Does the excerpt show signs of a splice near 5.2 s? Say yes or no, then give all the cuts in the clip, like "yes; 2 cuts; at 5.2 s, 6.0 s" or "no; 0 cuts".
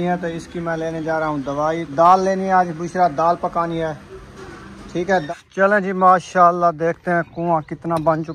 yes; 2 cuts; at 1.9 s, 5.2 s